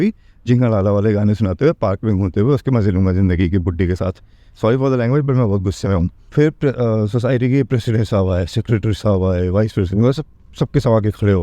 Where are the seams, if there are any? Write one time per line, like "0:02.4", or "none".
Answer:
0:06.2